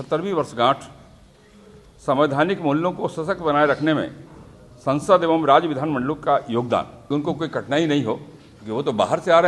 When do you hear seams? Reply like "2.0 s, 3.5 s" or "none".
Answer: 7.0 s

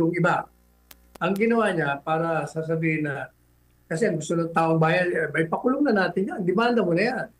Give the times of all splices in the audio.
none

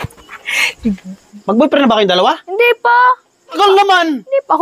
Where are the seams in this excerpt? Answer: 1.3 s, 3.6 s

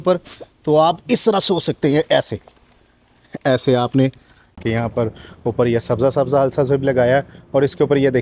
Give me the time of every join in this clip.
4.5 s

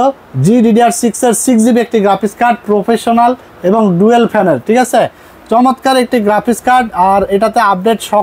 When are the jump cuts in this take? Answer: none

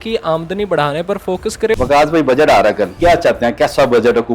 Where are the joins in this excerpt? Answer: 1.7 s, 2.9 s

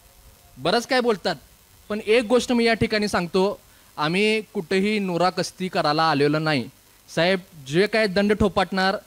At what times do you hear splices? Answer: none

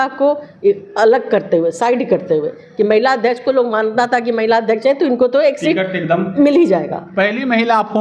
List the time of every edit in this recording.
none

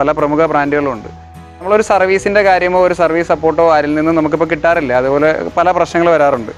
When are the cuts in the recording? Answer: none

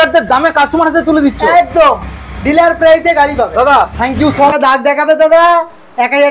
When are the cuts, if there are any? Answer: 4.5 s

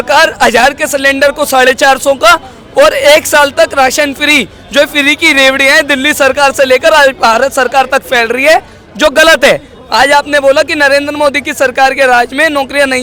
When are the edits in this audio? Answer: none

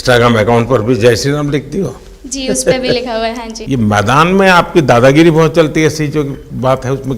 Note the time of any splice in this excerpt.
3.5 s

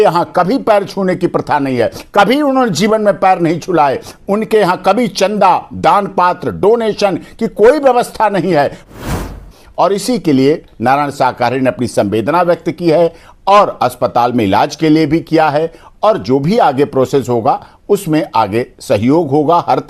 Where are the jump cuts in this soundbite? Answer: 9.0 s

